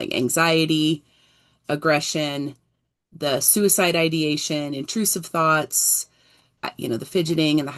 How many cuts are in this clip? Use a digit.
1